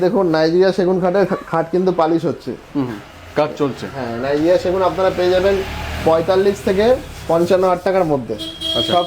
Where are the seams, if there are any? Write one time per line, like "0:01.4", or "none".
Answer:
none